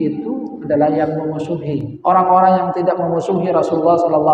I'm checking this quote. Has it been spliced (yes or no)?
yes